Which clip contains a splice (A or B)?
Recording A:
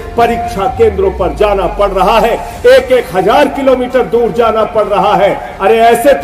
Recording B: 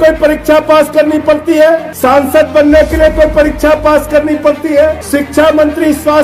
B